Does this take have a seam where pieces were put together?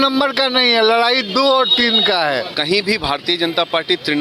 yes; 1 cut; at 2.5 s

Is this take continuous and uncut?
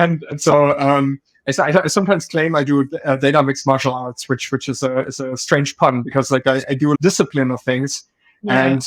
yes; 0 cuts

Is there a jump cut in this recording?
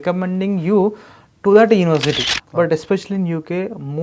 yes; 1 cut; at 2.3 s

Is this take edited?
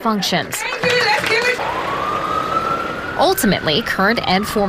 yes; 1 cut; at 1.6 s

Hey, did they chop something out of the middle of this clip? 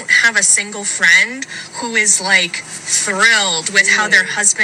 no; 0 cuts

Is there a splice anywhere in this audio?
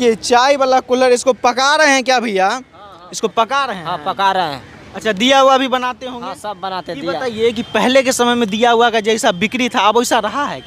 no; 0 cuts

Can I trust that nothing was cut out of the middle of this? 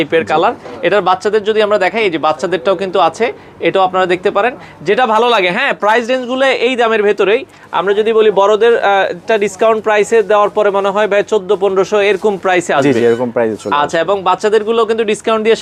yes; 0 cuts

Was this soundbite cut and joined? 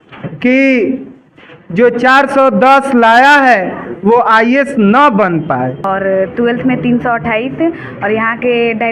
yes; 1 cut; at 5.9 s

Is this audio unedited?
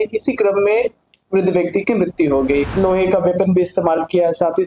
no; 1 cut; at 2.7 s

